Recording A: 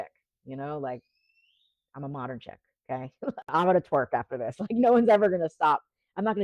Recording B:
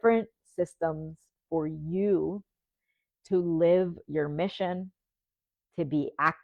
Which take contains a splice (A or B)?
A